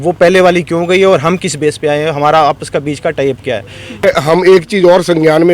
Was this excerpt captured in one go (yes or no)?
no